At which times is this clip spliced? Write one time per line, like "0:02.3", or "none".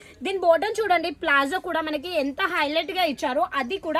none